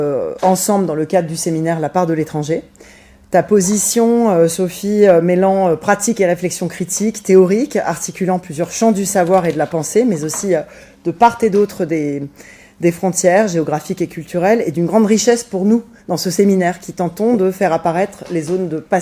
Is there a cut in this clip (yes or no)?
no